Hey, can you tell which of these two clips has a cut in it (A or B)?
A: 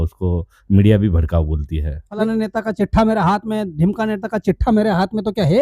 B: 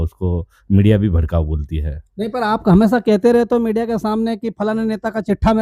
A